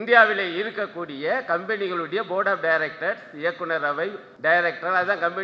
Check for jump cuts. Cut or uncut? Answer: cut